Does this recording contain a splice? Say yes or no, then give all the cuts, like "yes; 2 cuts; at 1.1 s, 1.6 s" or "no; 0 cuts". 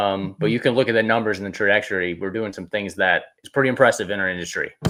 no; 0 cuts